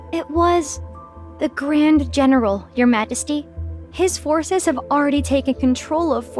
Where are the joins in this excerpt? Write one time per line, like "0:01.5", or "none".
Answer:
none